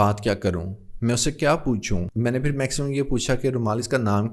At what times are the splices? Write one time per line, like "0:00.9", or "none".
0:02.1